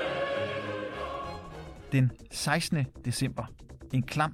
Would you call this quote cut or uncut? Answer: cut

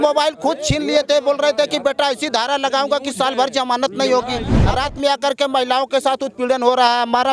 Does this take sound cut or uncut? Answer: cut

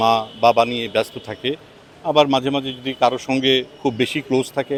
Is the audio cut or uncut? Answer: uncut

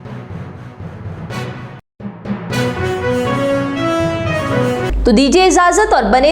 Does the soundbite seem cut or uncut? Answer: uncut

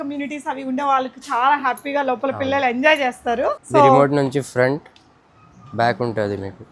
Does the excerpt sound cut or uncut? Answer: cut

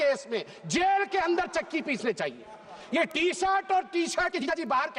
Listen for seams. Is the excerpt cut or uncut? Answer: uncut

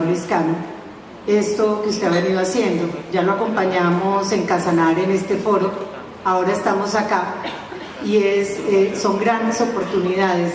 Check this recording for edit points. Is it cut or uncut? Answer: uncut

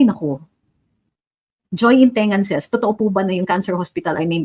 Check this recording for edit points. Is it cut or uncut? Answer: uncut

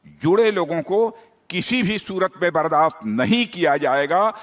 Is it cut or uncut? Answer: uncut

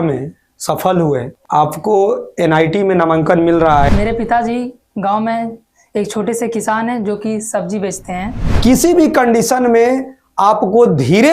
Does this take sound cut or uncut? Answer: cut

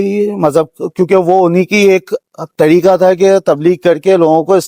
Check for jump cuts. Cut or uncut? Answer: uncut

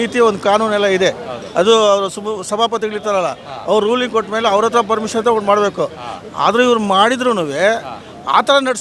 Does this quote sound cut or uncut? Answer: uncut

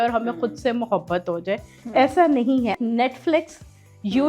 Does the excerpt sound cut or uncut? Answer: cut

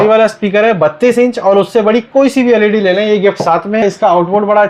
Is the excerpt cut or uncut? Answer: cut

